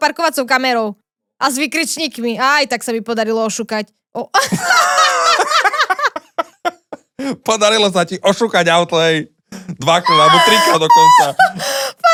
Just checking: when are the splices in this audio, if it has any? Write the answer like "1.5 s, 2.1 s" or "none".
none